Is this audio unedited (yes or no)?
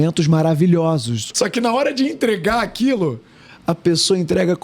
no